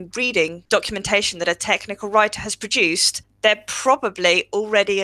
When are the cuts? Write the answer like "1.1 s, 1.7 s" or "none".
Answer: none